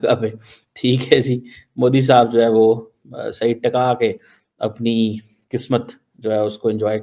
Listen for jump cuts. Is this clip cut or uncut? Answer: uncut